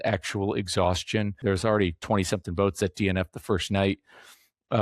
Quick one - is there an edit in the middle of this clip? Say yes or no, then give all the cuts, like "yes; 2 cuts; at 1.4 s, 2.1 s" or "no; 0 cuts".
yes; 1 cut; at 1.4 s